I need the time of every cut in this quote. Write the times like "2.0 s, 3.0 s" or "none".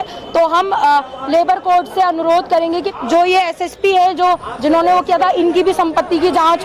2.9 s